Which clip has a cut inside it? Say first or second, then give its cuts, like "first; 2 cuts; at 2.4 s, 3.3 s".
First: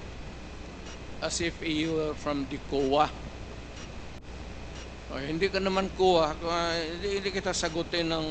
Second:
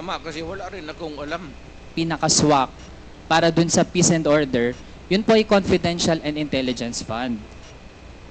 second; 1 cut; at 1.9 s